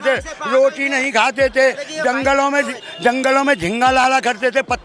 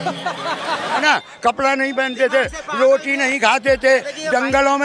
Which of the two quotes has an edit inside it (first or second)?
second